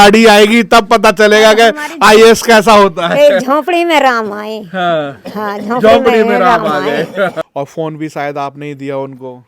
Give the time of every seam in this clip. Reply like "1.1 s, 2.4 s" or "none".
7.4 s